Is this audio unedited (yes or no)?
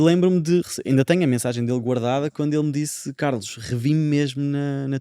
yes